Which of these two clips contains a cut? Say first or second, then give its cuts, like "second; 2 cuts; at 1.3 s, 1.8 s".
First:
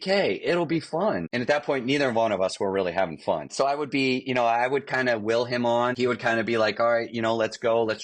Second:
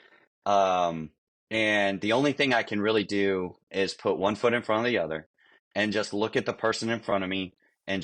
first; 3 cuts; at 1.3 s, 3.5 s, 5.9 s